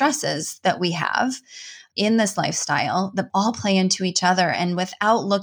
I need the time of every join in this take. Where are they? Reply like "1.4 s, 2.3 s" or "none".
1.8 s, 3.3 s